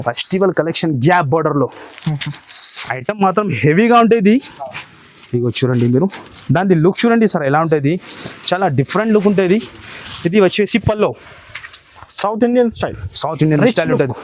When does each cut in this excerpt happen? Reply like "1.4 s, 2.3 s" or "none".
none

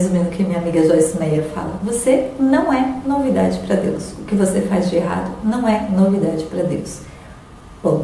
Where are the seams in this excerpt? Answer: none

